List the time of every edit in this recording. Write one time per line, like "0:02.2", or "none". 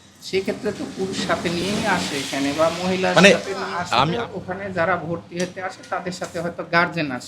0:04.1